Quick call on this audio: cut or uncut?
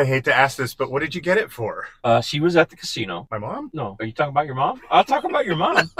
cut